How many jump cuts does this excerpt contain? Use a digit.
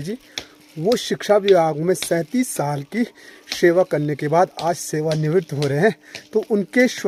0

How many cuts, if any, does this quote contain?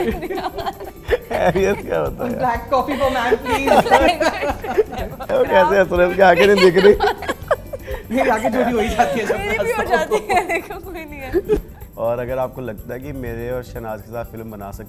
2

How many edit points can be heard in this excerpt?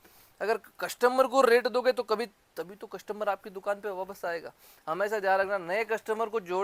0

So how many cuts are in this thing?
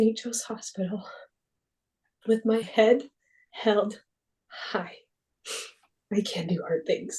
0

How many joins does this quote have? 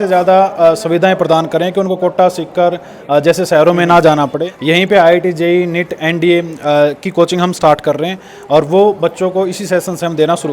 1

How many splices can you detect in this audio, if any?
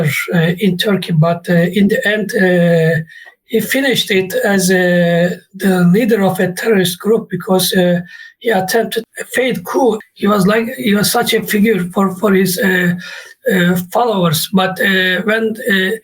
2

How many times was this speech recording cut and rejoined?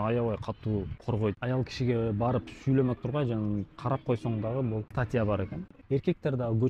2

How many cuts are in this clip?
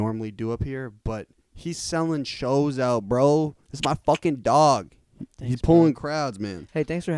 0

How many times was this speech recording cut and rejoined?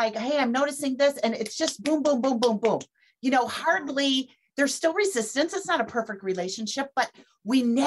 0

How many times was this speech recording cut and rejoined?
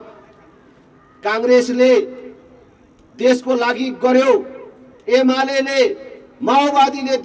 0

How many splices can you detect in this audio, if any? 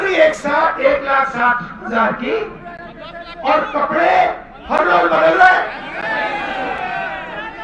0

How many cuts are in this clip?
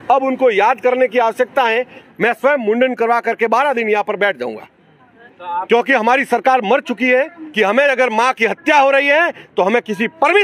2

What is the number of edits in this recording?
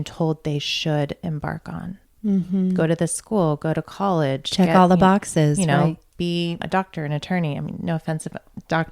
2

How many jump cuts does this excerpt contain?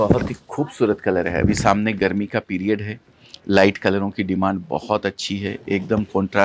0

